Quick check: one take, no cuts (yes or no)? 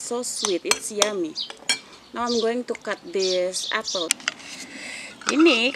no